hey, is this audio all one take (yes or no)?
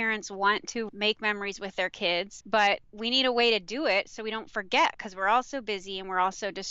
no